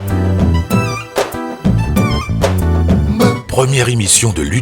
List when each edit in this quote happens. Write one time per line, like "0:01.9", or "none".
0:03.4